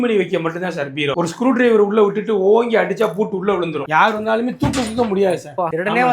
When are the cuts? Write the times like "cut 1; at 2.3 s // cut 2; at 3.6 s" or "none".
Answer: cut 1; at 1.1 s // cut 2; at 3.8 s